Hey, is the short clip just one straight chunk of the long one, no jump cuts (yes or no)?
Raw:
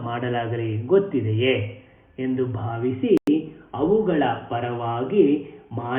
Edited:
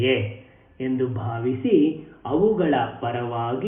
no